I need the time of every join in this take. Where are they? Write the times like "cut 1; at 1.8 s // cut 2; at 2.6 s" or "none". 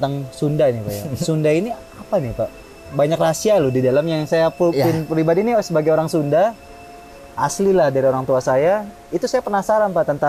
none